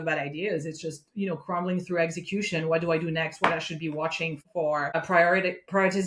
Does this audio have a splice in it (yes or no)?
no